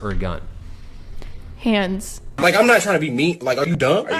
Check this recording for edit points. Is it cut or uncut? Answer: cut